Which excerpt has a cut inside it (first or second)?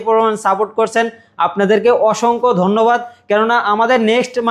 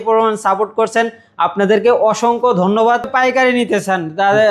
second